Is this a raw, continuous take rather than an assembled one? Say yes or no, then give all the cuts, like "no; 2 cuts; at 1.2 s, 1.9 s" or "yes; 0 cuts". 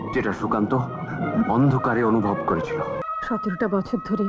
no; 1 cut; at 3.0 s